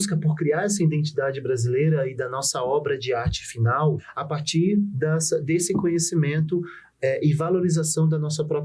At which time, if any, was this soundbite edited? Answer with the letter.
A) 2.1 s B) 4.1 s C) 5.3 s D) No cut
B